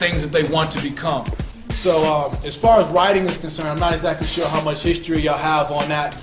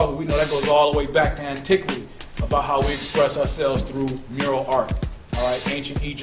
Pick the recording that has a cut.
first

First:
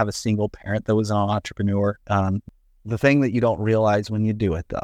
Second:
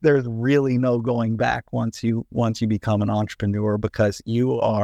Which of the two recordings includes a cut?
first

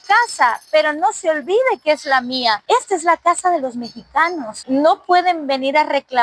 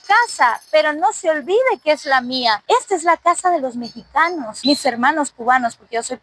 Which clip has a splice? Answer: first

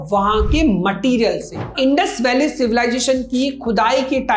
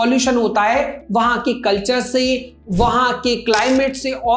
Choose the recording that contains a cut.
first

